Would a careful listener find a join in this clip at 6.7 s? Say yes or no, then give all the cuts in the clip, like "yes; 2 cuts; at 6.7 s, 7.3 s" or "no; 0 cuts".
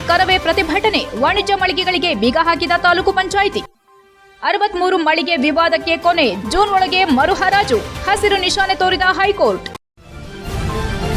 no; 1 cut; at 9.7 s